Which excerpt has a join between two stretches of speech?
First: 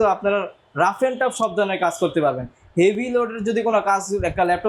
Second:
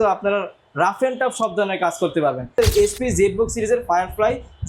second; 1 cut; at 2.5 s

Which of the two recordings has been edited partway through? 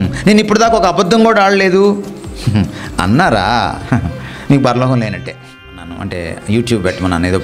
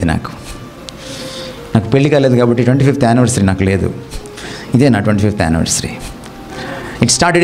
first; 1 cut; at 6.0 s

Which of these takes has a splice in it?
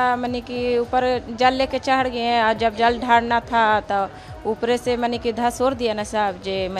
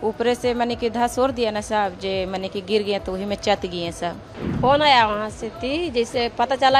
second; 1 cut; at 4.3 s

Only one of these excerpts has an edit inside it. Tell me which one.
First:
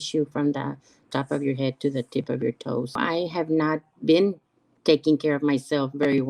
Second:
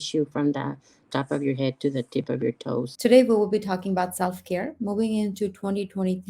first; 1 cut; at 3.0 s

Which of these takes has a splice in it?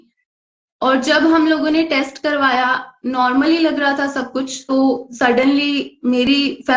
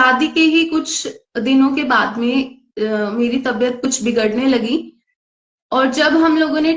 first; 1 cut; at 4.6 s

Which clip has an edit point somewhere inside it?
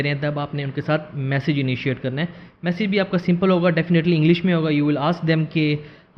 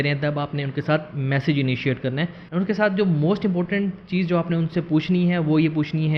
second; 1 cut; at 2.4 s

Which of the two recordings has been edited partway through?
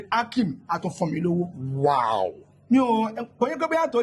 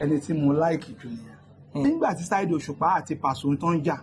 second; 1 cut; at 1.8 s

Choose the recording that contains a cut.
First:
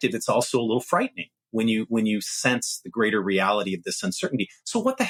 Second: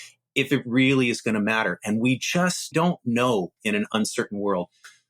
second; 2 cuts; at 2.7 s, 3.6 s

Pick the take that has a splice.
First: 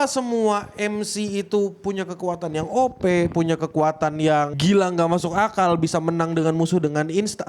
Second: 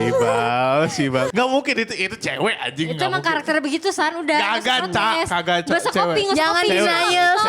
second; 1 cut; at 1.3 s

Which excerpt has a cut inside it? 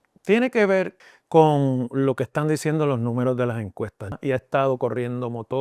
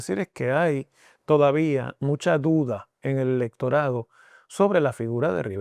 first; 2 cuts; at 0.9 s, 4.2 s

